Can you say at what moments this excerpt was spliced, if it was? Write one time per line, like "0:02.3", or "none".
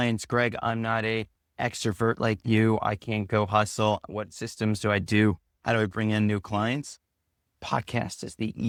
none